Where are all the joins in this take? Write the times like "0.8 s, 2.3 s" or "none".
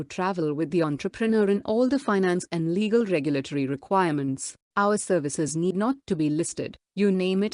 5.7 s